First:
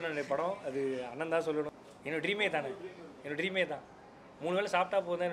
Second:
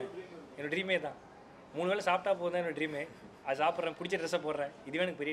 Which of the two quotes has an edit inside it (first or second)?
first